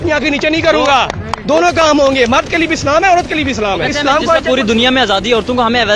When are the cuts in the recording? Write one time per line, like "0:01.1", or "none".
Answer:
0:03.8